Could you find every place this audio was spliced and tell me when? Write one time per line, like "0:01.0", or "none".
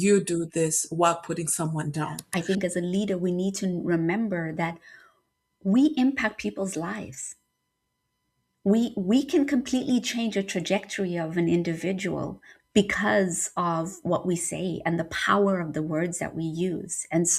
0:02.2

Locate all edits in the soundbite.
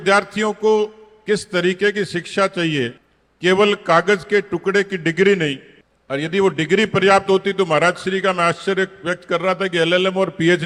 none

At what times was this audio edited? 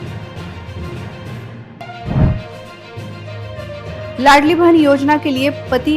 0:01.7

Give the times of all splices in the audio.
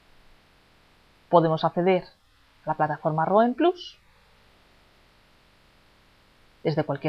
0:03.4

